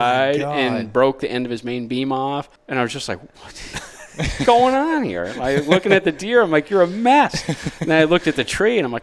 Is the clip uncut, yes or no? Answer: no